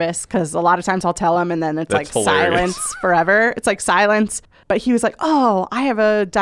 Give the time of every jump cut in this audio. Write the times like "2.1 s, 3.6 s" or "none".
4.5 s